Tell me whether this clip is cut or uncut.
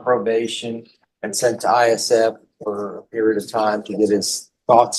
uncut